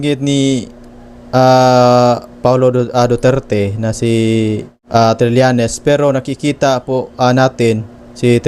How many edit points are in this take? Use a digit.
1